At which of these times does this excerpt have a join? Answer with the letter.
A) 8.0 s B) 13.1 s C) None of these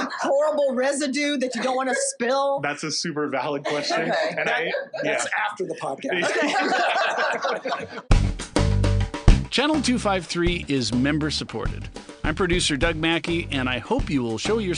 A